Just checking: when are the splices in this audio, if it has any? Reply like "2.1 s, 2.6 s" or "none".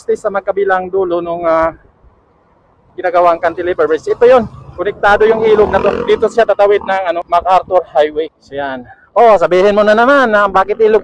7.2 s, 8.4 s